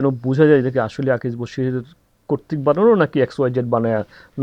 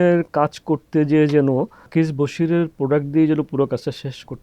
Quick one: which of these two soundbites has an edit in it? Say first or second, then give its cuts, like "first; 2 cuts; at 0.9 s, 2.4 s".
second; 1 cut; at 1.8 s